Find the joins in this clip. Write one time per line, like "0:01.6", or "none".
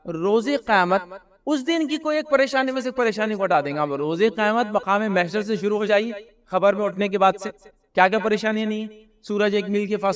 none